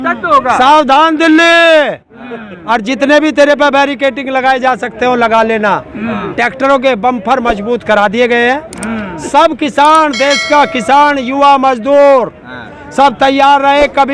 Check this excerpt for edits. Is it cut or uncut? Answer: uncut